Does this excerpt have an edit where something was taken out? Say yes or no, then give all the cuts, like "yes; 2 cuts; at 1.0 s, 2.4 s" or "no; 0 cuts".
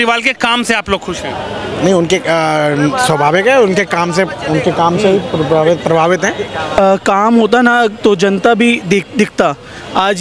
yes; 1 cut; at 6.8 s